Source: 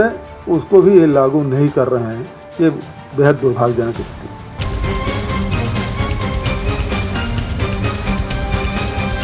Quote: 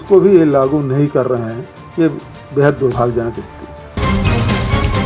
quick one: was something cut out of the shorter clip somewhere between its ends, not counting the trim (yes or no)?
yes